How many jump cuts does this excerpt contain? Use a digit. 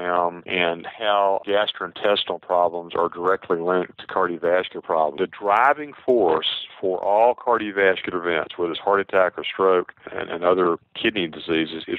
1